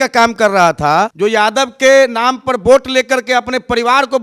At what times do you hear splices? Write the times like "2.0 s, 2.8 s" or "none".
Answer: 1.1 s